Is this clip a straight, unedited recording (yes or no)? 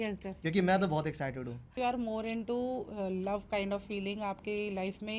no